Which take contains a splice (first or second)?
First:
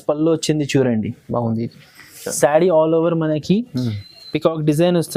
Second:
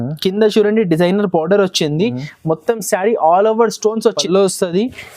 second